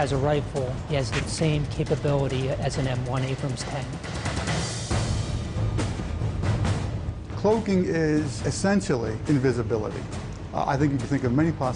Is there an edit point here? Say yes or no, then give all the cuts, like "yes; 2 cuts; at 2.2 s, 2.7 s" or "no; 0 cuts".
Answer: yes; 1 cut; at 10.4 s